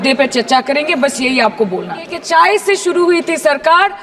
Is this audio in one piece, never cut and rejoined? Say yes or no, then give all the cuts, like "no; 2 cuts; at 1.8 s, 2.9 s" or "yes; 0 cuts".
no; 1 cut; at 2.1 s